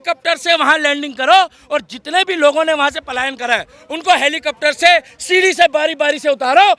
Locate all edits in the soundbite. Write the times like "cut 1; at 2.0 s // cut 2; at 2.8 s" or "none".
none